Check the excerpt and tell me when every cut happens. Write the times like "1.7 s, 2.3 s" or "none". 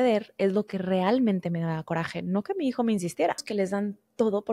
3.4 s